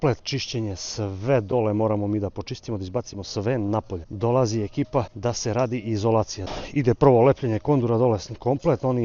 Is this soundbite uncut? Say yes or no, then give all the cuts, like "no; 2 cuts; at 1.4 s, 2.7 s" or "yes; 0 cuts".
yes; 0 cuts